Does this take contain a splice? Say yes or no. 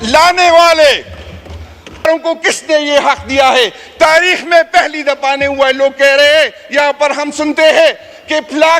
yes